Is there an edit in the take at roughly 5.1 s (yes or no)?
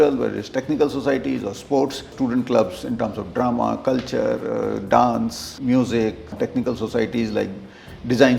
no